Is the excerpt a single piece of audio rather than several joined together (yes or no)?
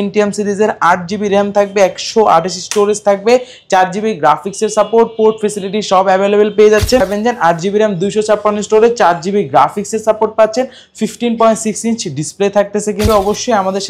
no